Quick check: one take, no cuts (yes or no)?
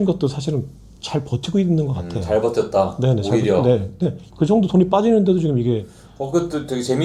yes